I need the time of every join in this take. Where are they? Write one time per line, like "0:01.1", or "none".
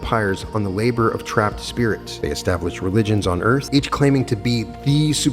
0:02.1
0:03.6